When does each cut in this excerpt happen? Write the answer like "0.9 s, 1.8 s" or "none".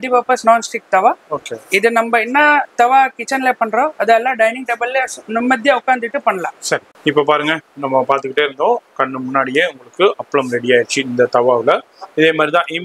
7.0 s